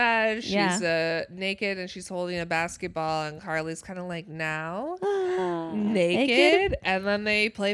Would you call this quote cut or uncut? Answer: uncut